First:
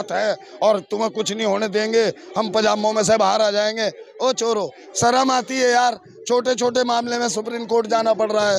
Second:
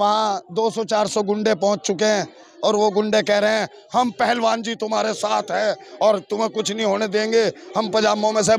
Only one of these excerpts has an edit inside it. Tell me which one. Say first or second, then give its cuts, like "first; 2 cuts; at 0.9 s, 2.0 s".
first; 1 cut; at 4.8 s